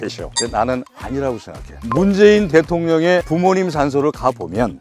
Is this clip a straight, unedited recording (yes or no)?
yes